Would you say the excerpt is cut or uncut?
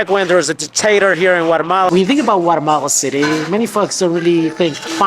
cut